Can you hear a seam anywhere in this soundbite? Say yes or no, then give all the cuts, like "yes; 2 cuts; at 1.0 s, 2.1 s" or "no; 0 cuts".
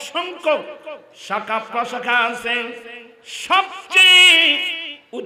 no; 0 cuts